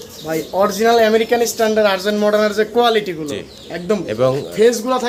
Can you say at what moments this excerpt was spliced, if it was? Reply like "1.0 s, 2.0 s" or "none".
none